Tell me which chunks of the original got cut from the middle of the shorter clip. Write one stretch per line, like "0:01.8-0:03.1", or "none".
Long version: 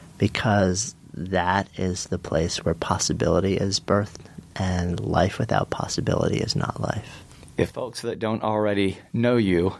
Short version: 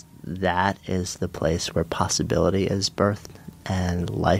none

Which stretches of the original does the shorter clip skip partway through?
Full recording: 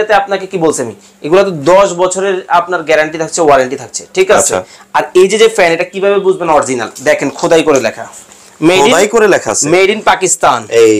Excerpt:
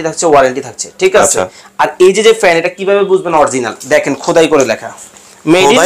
none

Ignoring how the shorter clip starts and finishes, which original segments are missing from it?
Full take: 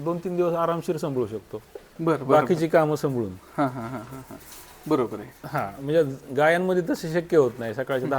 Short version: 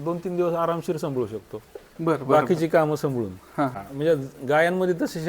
0:03.8-0:05.7

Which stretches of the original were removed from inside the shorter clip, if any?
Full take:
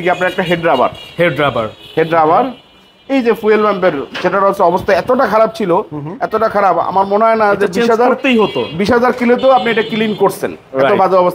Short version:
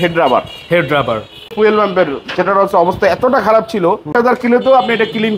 0:02.0-0:03.4
0:06.0-0:08.9

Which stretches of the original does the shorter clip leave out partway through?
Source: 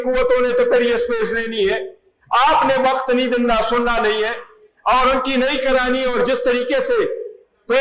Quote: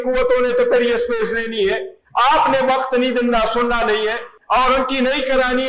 0:01.9-0:02.1
0:04.5-0:04.7

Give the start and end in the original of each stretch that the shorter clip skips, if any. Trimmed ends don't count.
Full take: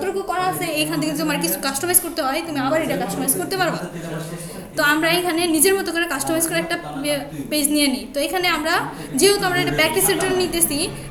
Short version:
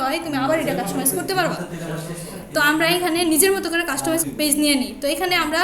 0:06.5-0:07.4

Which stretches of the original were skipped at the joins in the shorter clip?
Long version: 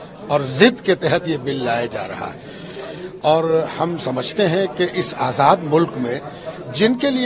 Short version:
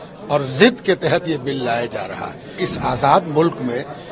0:02.6-0:04.9

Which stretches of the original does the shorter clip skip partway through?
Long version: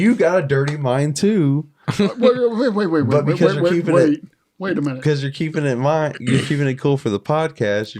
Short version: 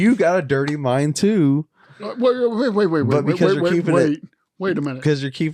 none

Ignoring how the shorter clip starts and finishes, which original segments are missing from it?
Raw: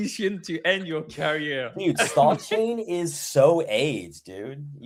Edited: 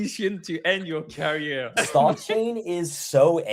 0:01.7-0:02.0

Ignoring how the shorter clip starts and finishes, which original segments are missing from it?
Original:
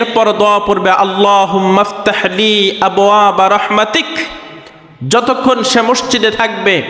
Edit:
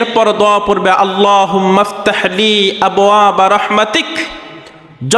none

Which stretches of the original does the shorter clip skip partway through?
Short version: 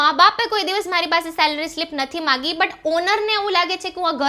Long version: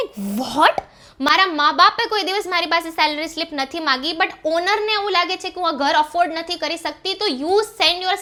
none

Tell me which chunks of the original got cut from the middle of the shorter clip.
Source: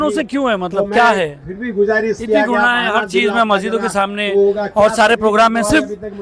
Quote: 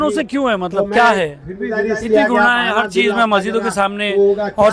0:01.8-0:02.0

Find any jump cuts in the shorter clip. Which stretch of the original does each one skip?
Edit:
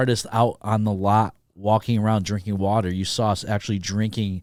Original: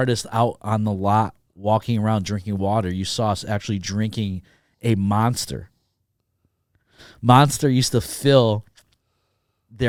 none

